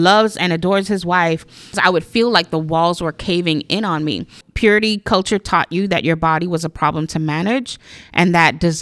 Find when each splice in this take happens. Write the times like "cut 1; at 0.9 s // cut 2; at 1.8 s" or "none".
cut 1; at 1.8 s // cut 2; at 4.4 s